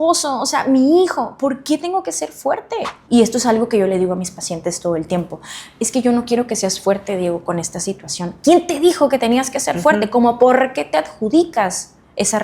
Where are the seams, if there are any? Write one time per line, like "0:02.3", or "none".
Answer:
0:03.0